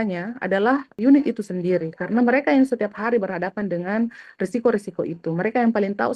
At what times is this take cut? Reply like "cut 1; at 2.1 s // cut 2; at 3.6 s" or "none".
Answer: cut 1; at 0.9 s